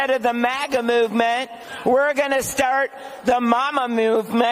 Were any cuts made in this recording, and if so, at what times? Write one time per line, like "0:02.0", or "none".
none